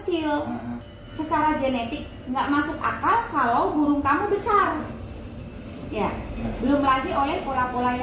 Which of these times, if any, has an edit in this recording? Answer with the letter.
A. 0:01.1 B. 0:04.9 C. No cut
C